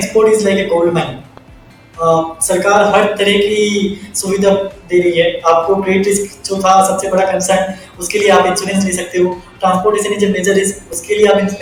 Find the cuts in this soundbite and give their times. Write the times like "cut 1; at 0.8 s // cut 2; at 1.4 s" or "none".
none